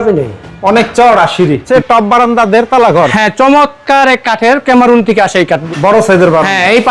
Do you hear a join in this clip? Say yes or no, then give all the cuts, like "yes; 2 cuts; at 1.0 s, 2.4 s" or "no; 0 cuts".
yes; 2 cuts; at 1.6 s, 5.6 s